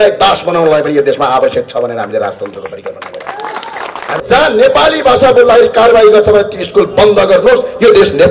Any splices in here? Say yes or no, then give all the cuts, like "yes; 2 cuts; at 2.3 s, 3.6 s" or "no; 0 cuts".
yes; 1 cut; at 4.0 s